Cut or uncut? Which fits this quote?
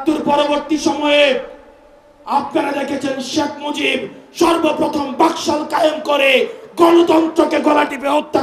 uncut